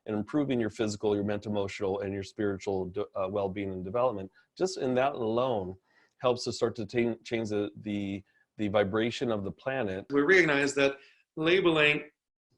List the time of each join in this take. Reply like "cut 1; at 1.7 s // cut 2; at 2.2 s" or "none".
cut 1; at 10.1 s